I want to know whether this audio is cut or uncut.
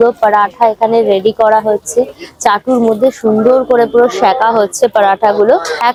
uncut